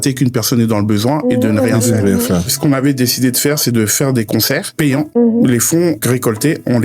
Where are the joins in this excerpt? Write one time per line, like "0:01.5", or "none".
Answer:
0:02.5
0:04.8
0:06.0